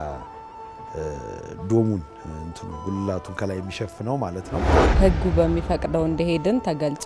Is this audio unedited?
no; 1 cut; at 4.8 s

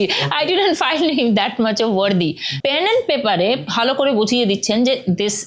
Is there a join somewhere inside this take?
yes; 2 cuts; at 2.5 s, 3.6 s

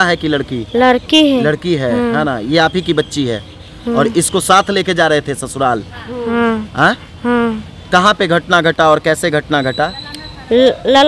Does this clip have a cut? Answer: no; 0 cuts

